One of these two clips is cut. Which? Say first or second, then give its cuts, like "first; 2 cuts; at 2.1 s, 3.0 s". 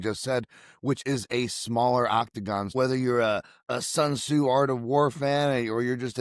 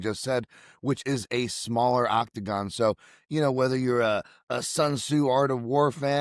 first; 1 cut; at 2.7 s